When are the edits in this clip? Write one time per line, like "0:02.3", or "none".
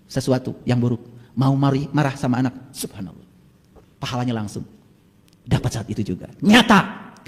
none